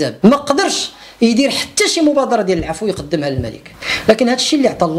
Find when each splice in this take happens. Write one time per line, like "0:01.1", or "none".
none

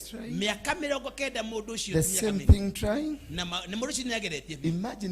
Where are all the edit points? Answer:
none

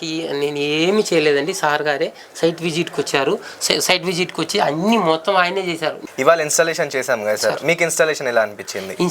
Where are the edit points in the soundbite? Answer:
0:06.0

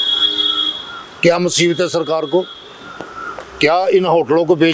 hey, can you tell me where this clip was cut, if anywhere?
none

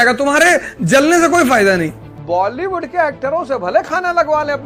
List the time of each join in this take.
0:02.1

